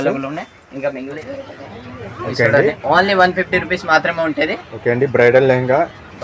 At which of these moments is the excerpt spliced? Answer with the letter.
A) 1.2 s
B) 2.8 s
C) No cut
A